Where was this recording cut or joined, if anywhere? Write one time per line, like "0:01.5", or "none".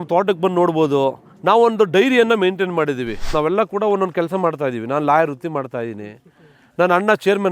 0:03.2

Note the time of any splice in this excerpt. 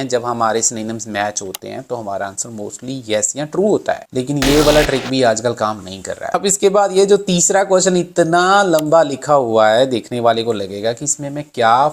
0:06.3

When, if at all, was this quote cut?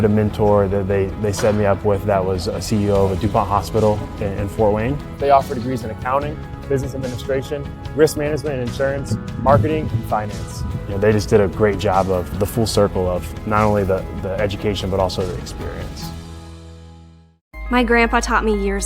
0:17.5

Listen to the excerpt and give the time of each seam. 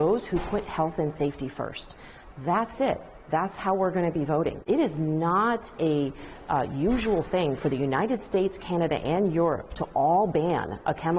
0:04.6

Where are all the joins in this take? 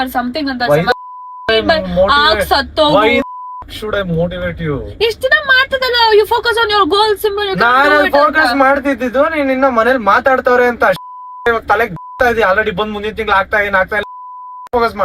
none

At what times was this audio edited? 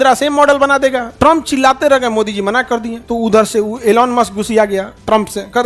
0:01.1
0:03.0

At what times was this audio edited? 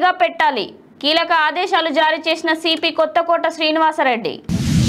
none

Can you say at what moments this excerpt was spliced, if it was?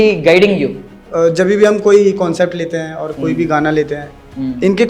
0:01.0

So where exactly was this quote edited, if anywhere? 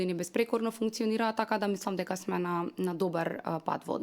none

